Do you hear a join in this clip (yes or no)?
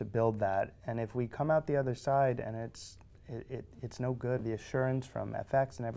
yes